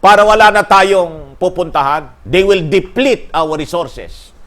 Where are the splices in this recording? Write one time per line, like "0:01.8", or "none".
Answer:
0:02.1